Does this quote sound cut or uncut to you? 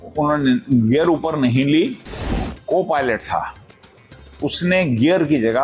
cut